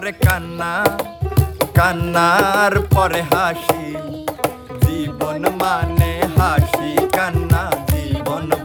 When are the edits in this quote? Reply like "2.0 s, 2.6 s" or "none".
none